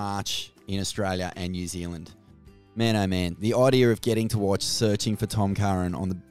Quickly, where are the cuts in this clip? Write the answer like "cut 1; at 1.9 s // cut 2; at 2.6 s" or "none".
none